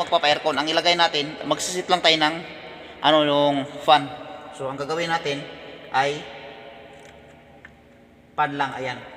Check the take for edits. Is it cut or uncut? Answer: uncut